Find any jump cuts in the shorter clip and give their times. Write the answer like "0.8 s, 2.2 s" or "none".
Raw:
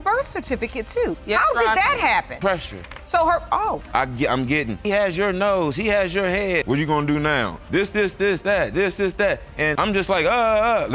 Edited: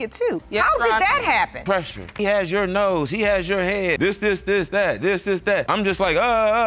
2.1 s, 4.0 s, 5.7 s

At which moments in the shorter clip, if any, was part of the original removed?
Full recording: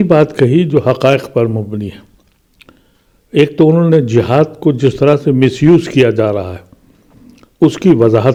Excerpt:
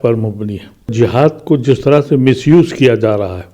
0.9 s

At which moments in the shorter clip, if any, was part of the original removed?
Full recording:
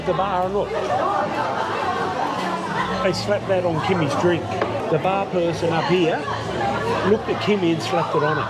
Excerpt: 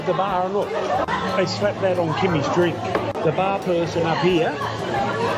1.0 s

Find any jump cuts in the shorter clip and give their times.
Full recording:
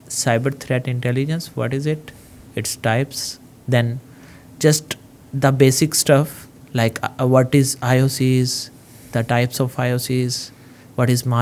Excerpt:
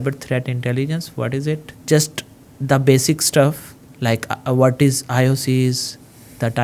1.7 s

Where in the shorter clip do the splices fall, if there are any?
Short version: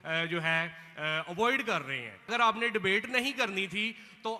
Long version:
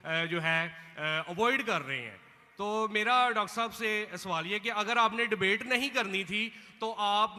2.3 s

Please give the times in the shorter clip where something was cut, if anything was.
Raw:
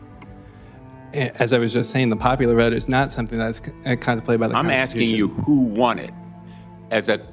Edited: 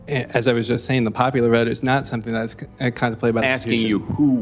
3.4 s

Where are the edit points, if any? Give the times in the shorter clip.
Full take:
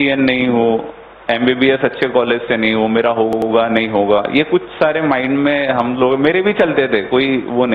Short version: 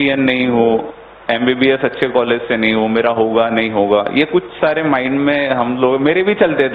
3.3 s

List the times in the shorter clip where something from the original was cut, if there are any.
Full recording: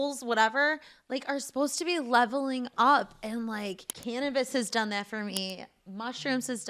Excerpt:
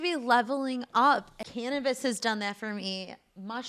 1.4 s

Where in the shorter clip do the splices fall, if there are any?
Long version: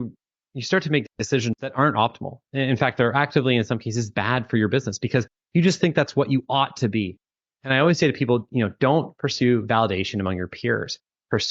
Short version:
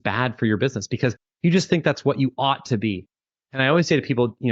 none

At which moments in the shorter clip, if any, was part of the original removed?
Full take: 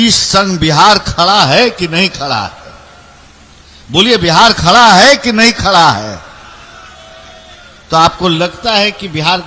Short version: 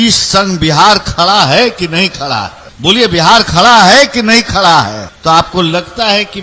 2.6 s, 5.1 s

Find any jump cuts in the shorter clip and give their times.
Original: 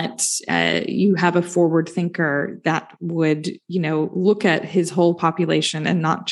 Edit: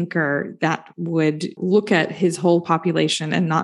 1.6 s

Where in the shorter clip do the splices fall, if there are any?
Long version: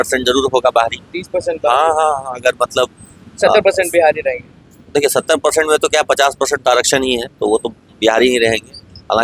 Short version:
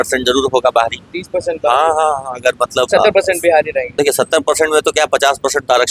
2.9 s, 3.9 s

